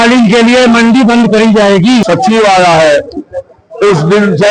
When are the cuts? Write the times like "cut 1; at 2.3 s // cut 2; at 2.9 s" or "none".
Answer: cut 1; at 2.0 s